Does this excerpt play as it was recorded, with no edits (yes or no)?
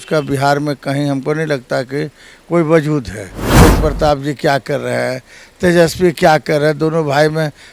no